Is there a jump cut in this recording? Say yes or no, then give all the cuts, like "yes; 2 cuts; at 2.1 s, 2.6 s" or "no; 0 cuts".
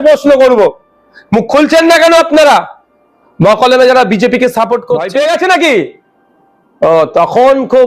yes; 1 cut; at 5.0 s